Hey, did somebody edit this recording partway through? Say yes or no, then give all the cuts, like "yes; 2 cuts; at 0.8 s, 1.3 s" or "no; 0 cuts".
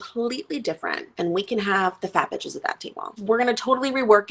yes; 2 cuts; at 1.0 s, 3.2 s